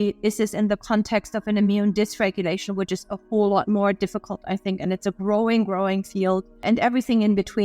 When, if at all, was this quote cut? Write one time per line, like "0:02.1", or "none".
0:06.6